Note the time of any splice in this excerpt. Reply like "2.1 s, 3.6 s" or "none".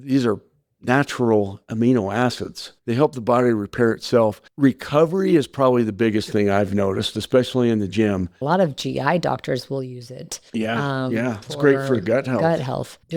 8.4 s